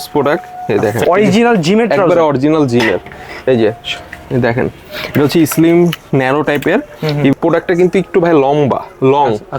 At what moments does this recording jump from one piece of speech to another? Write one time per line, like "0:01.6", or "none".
0:01.0
0:07.3